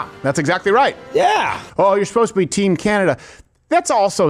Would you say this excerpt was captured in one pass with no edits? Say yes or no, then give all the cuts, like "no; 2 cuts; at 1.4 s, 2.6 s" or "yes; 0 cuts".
no; 1 cut; at 1.6 s